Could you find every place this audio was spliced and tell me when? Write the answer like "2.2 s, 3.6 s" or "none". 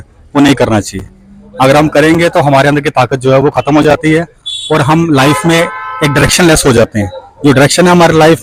none